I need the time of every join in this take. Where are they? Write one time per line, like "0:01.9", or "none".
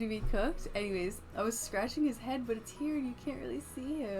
0:01.3

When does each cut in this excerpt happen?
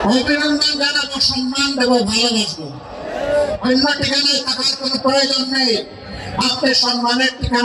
none

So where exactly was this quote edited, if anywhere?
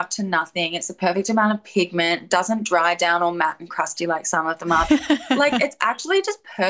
0:05.4

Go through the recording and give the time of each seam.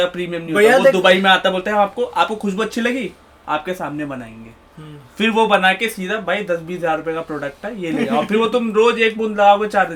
none

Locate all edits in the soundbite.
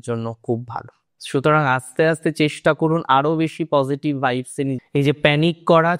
0:04.8

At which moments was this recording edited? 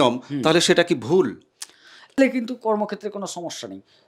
0:02.2

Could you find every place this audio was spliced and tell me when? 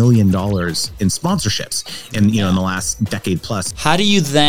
0:01.2
0:03.6

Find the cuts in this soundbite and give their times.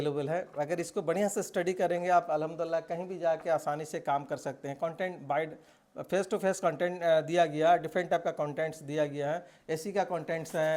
none

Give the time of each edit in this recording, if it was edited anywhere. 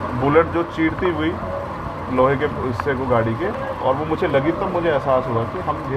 none

